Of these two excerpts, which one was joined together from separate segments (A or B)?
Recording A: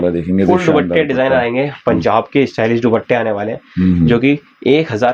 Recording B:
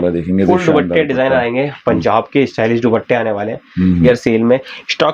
B